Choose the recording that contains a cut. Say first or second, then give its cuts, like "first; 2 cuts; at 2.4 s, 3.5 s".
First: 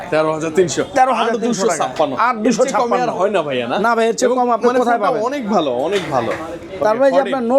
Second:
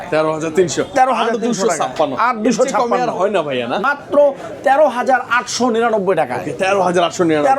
second; 1 cut; at 3.8 s